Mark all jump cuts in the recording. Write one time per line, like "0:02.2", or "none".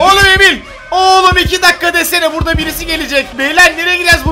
0:03.3